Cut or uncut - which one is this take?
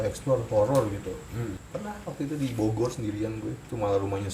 cut